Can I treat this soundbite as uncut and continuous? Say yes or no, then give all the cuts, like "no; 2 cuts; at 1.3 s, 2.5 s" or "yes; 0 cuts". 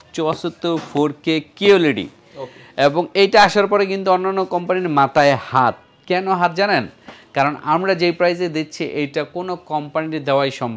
yes; 0 cuts